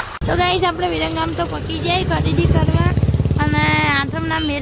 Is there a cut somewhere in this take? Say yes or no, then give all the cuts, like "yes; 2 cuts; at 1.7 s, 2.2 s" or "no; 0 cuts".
no; 0 cuts